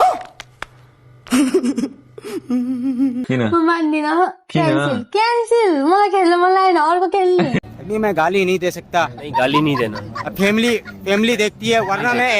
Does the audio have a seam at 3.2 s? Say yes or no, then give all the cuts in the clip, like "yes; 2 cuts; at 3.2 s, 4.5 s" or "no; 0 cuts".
yes; 1 cut; at 3.2 s